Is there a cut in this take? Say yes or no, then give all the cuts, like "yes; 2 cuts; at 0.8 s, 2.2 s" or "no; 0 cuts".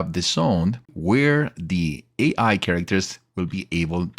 yes; 1 cut; at 0.9 s